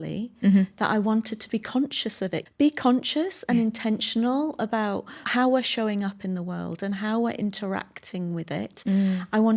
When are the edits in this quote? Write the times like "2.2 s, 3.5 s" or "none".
2.4 s, 5.2 s